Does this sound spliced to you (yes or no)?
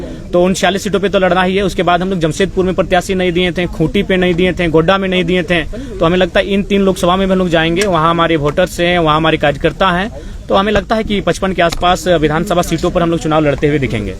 no